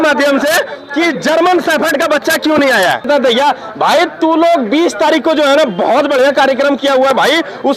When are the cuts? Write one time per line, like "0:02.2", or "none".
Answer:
0:03.1

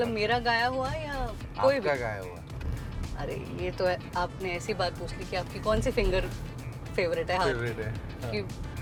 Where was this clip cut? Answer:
none

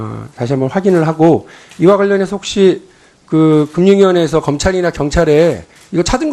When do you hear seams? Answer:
none

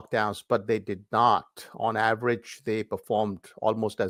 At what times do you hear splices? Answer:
none

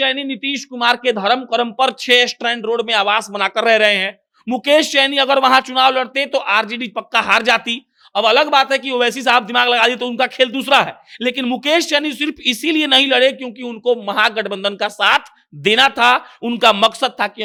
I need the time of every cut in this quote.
none

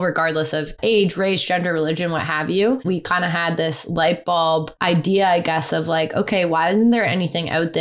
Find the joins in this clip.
0:02.8
0:04.7

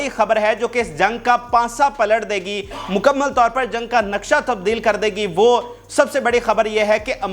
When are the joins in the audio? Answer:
none

